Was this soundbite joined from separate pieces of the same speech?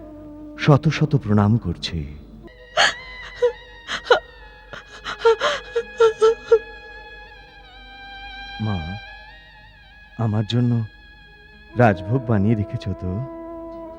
yes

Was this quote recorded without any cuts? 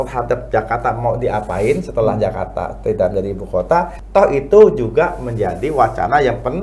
no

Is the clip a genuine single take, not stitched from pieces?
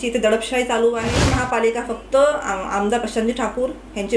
no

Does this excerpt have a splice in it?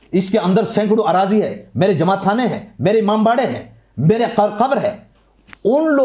no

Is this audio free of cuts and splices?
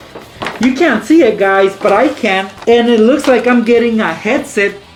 yes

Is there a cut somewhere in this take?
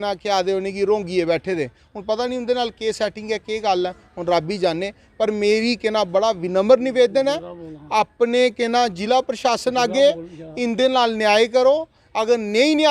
no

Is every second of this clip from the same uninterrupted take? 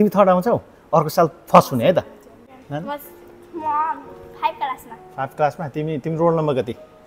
yes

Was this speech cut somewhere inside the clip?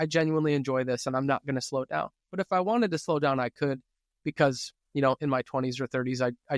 no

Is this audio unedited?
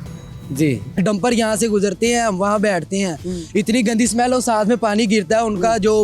no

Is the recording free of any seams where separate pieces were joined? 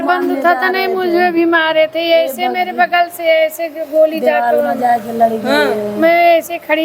yes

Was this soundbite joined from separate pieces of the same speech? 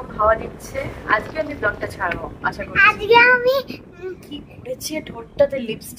no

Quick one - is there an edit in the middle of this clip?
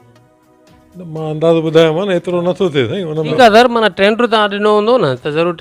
yes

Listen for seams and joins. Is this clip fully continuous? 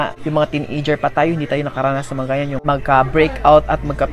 no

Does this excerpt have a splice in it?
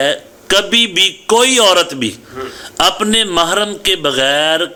no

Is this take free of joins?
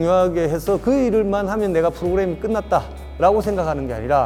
yes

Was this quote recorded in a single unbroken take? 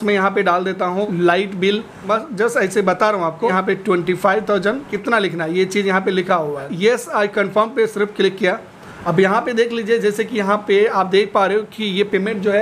no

